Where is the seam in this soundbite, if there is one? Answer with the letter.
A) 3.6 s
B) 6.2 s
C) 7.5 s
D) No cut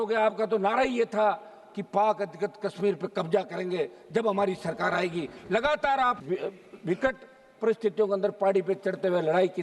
B